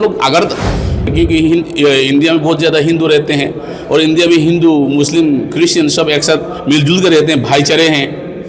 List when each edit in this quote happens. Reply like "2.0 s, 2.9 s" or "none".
1.1 s